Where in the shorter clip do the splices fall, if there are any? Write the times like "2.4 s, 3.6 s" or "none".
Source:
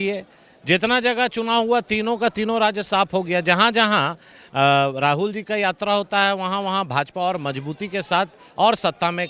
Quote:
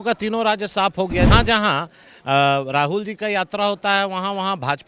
1.3 s